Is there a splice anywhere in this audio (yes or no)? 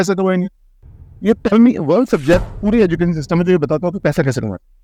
no